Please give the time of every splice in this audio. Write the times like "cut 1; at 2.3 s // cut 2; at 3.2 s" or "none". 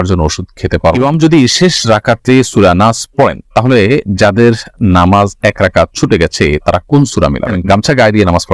cut 1; at 0.9 s // cut 2; at 7.5 s